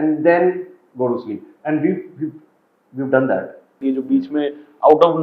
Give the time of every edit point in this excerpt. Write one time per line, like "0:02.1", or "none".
0:03.8

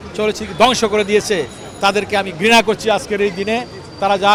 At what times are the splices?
none

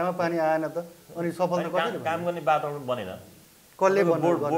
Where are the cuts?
none

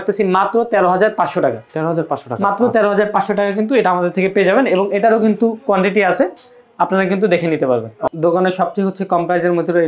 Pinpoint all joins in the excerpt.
none

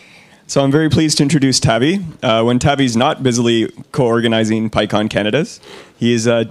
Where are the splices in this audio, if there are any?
none

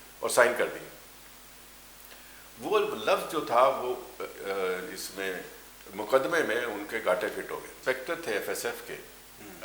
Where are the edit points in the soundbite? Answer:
0:07.7

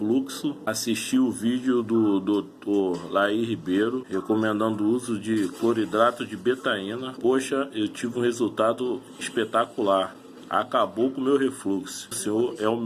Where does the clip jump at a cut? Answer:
0:07.1
0:12.1

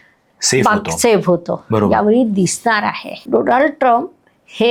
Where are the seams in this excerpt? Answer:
0:03.1

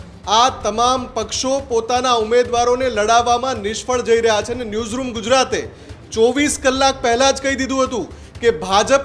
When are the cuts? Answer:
none

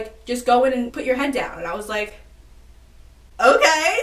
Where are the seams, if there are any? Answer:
0:00.9

